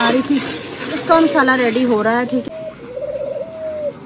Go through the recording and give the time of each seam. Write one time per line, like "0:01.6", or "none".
0:02.4

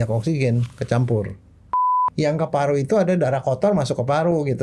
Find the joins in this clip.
0:02.0

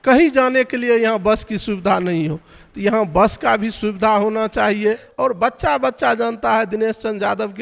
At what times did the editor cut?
0:05.1

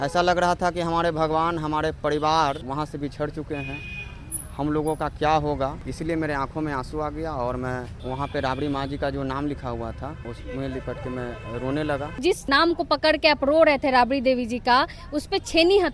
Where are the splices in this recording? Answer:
0:02.6
0:05.8
0:07.9
0:10.2
0:12.5

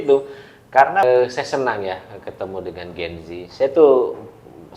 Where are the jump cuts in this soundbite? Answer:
0:01.0

